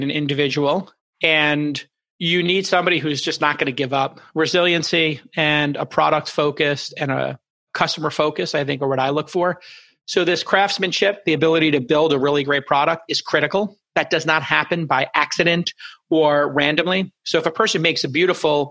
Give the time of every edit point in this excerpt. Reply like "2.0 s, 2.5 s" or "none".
1.0 s